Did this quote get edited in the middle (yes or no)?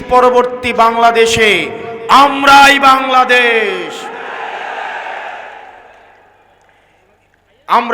no